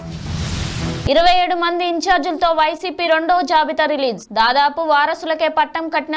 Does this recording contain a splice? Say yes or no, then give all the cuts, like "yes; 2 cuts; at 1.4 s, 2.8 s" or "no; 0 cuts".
yes; 1 cut; at 1.0 s